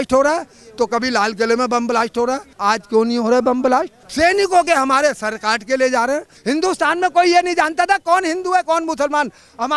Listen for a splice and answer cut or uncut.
cut